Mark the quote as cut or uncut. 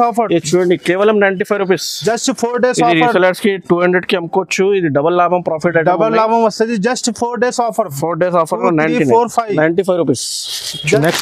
uncut